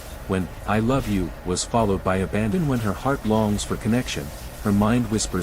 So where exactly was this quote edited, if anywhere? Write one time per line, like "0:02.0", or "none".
0:02.5